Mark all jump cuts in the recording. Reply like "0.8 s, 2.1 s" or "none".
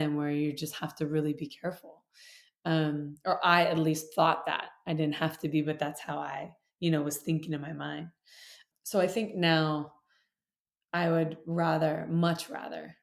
8.6 s